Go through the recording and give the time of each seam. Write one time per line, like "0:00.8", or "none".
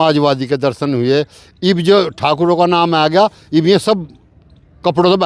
none

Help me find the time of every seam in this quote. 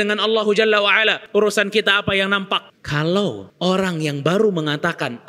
0:01.2
0:02.8
0:03.5

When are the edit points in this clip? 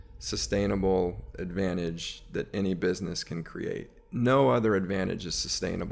none

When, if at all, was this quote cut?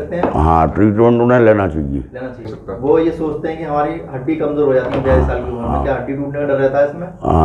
0:02.5

